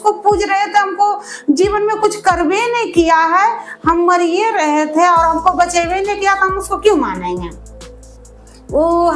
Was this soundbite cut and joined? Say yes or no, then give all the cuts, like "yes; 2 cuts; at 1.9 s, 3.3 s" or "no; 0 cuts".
no; 0 cuts